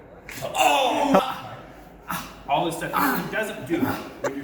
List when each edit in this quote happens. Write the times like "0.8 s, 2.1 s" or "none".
1.2 s